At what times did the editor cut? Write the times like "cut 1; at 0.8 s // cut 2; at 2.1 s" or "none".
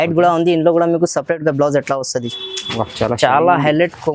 cut 1; at 2.3 s